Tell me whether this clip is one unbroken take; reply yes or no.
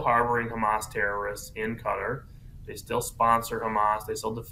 no